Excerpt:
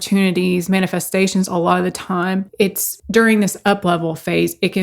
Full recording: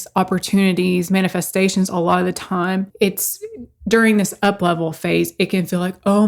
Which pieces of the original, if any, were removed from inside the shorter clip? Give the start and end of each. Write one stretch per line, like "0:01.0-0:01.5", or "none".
0:03.3-0:03.7